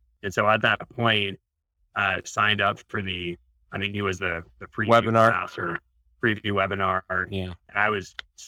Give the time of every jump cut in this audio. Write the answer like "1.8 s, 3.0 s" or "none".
none